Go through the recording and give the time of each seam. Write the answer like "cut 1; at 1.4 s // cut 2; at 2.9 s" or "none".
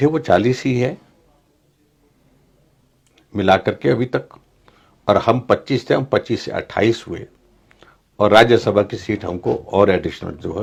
none